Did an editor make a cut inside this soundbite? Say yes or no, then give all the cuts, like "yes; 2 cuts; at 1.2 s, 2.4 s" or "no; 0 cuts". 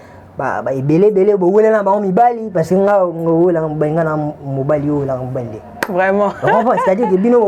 no; 0 cuts